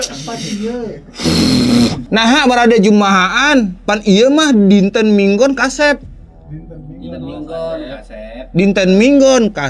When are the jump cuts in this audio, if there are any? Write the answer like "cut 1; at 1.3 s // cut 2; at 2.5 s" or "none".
cut 1; at 2.0 s